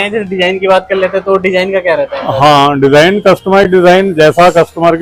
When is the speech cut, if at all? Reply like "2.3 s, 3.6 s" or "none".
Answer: none

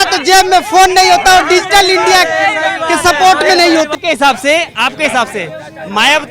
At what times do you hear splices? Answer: 3.9 s

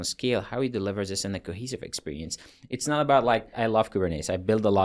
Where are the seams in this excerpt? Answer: 3.6 s

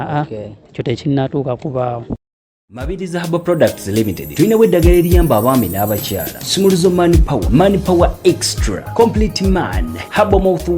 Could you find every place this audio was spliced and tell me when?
2.4 s

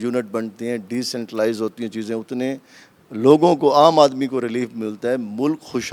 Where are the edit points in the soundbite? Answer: none

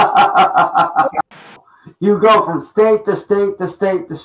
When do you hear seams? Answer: 1.4 s

